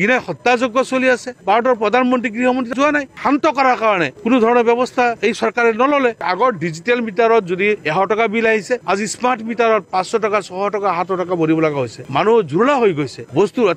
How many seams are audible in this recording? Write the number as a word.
three